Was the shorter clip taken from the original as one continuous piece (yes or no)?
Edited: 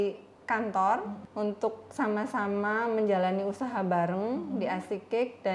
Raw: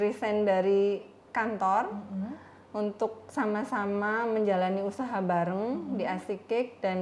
no